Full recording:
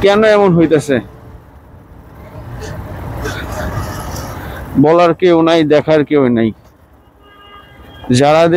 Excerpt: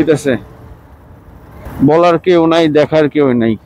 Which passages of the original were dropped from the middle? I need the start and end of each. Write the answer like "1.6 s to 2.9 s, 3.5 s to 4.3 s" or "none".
2.2 s to 4.5 s